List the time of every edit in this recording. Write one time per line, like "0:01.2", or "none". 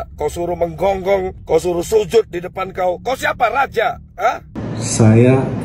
0:04.6